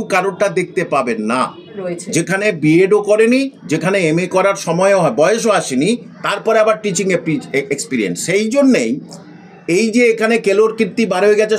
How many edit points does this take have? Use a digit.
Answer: 1